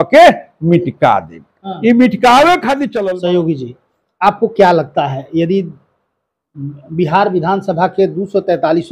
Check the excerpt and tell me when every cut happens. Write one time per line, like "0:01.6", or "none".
0:03.0